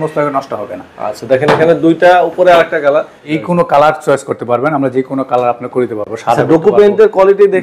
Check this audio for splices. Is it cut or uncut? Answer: cut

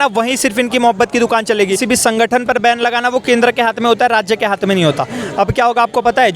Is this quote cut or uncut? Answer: cut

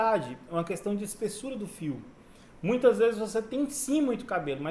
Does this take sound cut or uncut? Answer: uncut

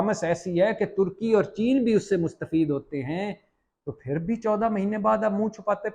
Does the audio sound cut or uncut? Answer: uncut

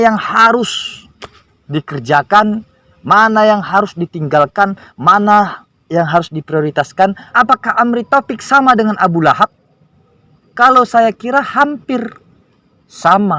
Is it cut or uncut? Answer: cut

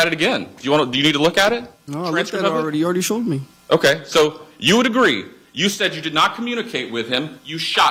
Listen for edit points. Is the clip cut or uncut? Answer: uncut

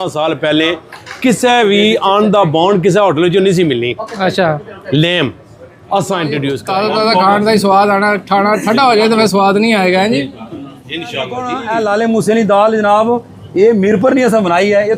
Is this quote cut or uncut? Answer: cut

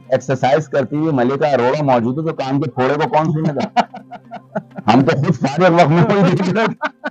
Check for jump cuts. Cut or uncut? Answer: uncut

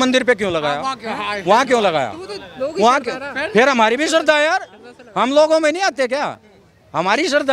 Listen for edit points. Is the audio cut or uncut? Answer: uncut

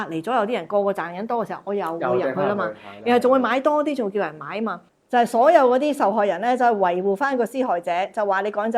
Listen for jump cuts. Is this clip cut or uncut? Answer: cut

